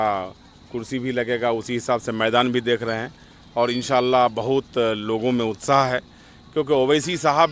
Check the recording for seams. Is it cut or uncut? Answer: uncut